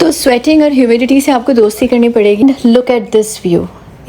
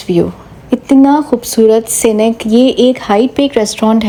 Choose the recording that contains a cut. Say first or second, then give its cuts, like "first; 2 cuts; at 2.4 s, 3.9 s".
first; 1 cut; at 2.4 s